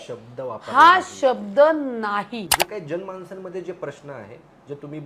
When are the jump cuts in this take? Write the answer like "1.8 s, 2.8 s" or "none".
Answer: 2.5 s